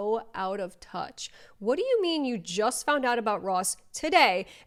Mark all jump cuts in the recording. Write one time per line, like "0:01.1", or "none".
none